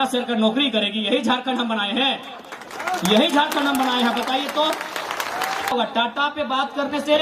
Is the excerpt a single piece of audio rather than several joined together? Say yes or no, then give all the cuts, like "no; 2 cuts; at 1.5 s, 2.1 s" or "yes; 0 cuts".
no; 1 cut; at 5.7 s